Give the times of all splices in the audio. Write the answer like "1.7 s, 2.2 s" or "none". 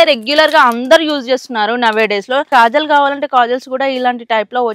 2.5 s